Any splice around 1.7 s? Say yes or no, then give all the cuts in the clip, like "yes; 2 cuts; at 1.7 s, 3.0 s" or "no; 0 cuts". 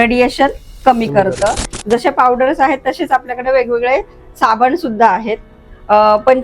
yes; 1 cut; at 1.7 s